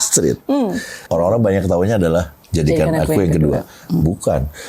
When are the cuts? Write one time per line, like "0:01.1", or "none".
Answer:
0:01.0